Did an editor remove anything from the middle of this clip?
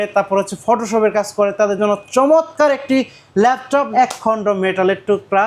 yes; 1 cut; at 3.9 s

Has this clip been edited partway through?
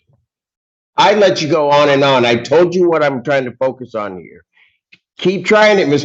no; 0 cuts

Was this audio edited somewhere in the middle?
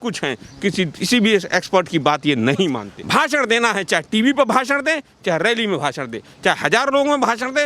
yes; 1 cut; at 2.9 s

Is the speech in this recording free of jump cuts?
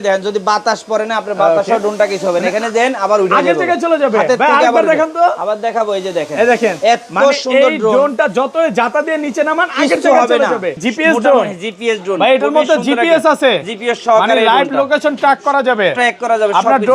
no; 1 cut; at 10.9 s

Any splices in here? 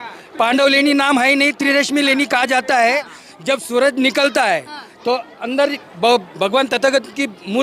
no; 0 cuts

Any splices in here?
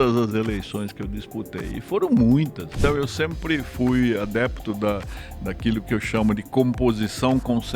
yes; 1 cut; at 2.8 s

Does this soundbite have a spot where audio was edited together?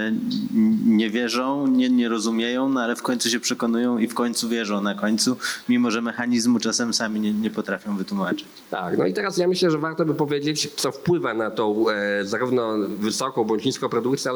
no; 0 cuts

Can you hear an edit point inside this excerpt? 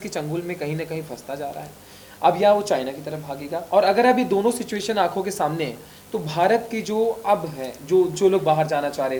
no; 0 cuts

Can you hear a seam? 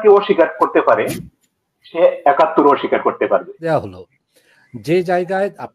yes; 1 cut; at 3.7 s

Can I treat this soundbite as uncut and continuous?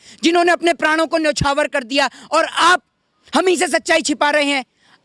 yes; 0 cuts

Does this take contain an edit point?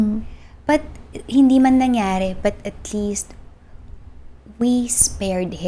no; 0 cuts

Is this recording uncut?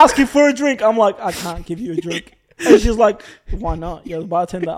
yes; 0 cuts

